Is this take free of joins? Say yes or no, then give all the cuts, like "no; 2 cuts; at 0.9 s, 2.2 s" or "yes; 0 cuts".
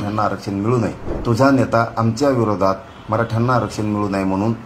no; 1 cut; at 1.1 s